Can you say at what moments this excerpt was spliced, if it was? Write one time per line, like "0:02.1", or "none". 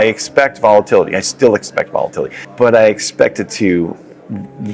none